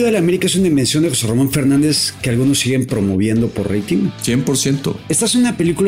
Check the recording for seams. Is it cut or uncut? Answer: cut